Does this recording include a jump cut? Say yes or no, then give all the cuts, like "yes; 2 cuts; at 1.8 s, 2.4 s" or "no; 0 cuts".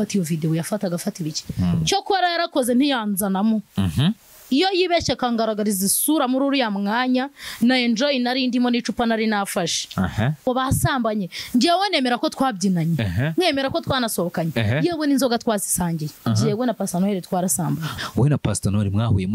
yes; 3 cuts; at 10.4 s, 16.1 s, 17.9 s